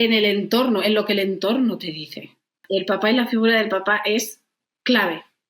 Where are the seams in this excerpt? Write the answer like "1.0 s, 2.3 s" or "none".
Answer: 2.6 s